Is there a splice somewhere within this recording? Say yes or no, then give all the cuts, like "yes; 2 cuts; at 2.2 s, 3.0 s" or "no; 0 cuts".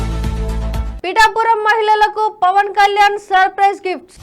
yes; 1 cut; at 0.9 s